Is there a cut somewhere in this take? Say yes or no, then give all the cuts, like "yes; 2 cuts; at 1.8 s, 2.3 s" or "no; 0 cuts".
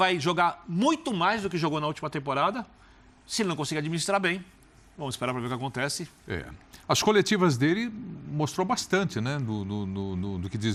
no; 0 cuts